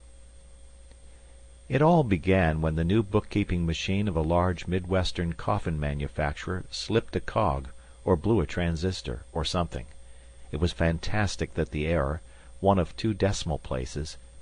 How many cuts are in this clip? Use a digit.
1